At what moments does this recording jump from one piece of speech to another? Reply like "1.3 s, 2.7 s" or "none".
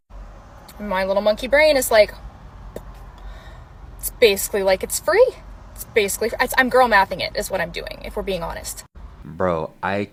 none